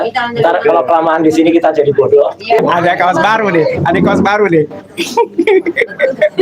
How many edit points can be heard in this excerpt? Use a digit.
1